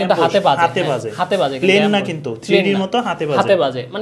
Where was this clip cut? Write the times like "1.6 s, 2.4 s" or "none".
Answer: none